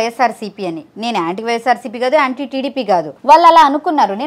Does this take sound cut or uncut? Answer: cut